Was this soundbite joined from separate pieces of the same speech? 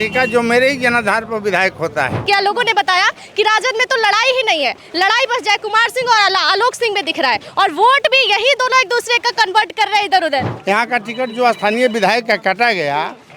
yes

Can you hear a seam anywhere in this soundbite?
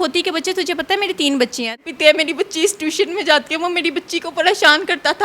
yes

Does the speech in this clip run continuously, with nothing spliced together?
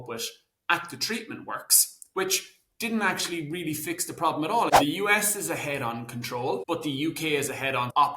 no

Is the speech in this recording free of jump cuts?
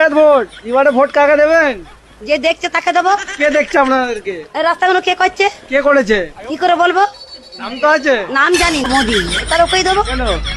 no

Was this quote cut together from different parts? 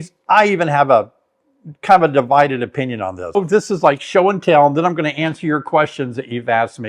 yes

